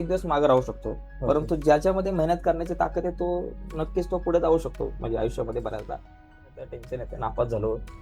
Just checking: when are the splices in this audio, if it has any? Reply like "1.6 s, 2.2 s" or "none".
6.4 s